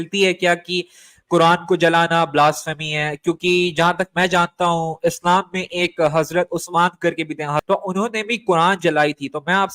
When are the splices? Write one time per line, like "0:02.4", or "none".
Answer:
0:07.6